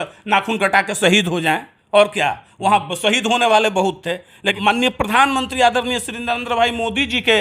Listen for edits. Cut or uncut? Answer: cut